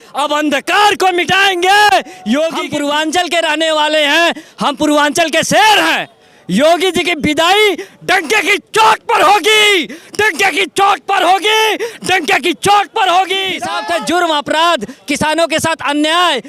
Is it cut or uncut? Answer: cut